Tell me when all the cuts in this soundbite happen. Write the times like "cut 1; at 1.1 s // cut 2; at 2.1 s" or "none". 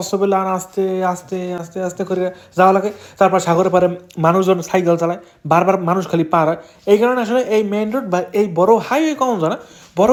none